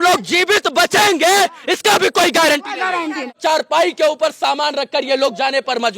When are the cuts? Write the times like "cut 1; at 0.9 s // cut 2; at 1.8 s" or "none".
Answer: cut 1; at 3.4 s